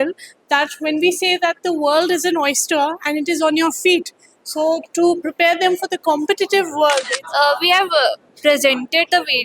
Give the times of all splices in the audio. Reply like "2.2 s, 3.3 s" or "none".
7.2 s

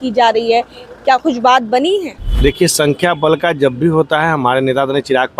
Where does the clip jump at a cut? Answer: 2.2 s

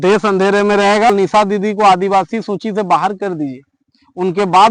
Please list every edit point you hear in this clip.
1.1 s

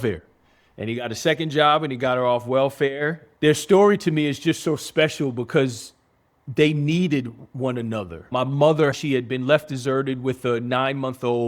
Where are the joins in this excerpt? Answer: 3.2 s, 8.3 s, 8.9 s

